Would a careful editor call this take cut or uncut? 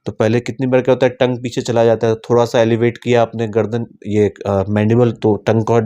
uncut